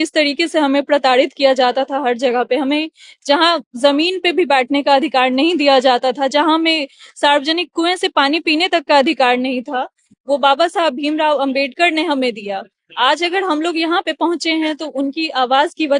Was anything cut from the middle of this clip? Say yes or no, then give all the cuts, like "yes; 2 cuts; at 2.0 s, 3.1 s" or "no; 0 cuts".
no; 0 cuts